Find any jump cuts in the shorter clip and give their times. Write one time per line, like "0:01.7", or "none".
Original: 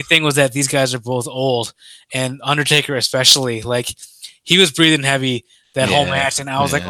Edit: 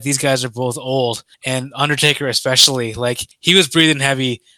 0:01.3
0:03.3